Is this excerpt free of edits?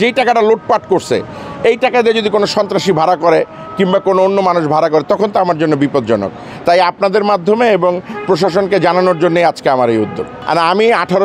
yes; 0 cuts

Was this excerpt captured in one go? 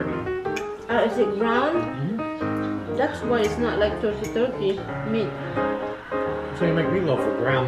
yes; 0 cuts

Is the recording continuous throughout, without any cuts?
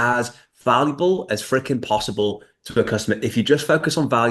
yes; 0 cuts

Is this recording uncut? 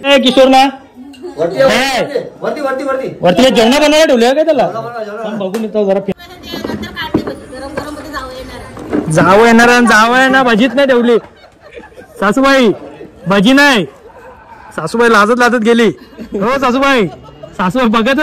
no; 1 cut; at 6.1 s

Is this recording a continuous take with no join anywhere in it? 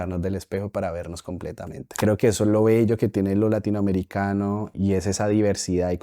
no; 1 cut; at 2.0 s

